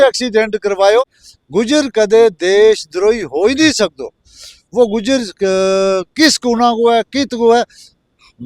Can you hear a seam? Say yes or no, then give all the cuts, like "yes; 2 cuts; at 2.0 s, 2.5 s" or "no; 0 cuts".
yes; 1 cut; at 1.0 s